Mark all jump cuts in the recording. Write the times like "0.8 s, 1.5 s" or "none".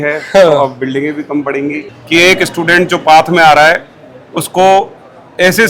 1.9 s